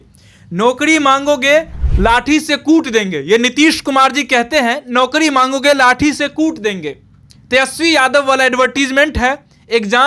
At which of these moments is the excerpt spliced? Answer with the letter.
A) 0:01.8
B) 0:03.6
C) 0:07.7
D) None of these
A